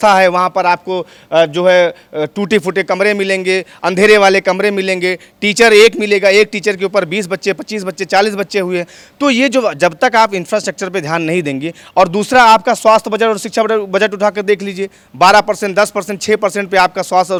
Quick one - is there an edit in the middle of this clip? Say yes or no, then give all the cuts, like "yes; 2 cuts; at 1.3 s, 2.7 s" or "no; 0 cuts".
no; 0 cuts